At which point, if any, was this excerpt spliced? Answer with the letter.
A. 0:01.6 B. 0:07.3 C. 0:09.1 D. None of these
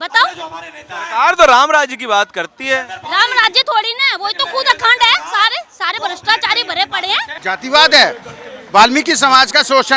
B